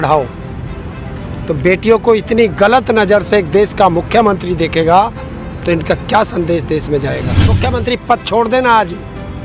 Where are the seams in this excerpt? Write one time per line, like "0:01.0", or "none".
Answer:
0:07.5